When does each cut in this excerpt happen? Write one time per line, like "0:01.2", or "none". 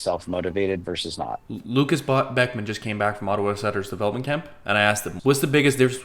0:01.4
0:05.1